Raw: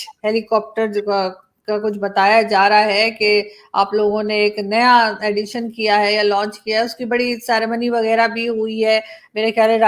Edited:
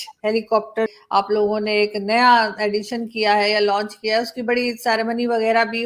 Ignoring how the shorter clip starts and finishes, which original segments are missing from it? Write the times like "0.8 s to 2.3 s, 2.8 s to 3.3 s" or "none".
0.9 s to 3.5 s